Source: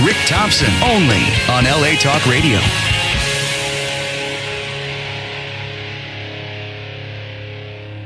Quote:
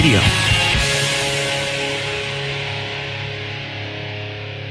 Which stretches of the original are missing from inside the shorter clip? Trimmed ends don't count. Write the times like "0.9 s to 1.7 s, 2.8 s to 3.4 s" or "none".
none